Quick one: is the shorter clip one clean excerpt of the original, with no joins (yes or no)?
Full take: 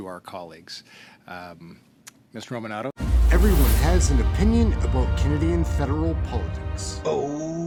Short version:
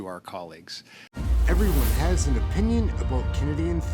no